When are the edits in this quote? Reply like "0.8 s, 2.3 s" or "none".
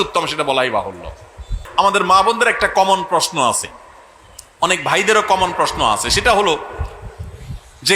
1.7 s